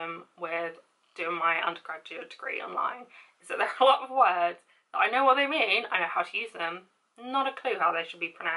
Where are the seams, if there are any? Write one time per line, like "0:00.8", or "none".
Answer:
none